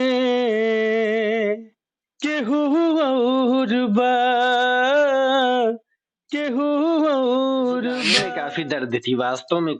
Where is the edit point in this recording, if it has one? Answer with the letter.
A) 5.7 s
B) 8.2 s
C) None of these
B